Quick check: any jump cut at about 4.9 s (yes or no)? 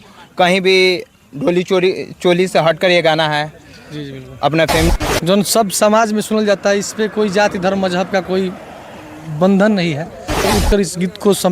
yes